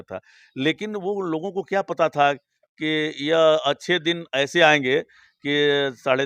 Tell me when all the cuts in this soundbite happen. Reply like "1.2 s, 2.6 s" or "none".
none